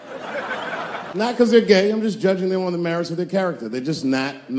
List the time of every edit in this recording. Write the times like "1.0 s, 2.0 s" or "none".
1.2 s